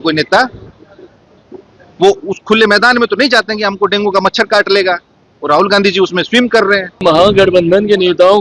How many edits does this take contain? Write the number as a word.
one